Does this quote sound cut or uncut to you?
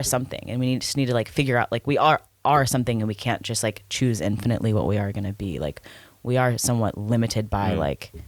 uncut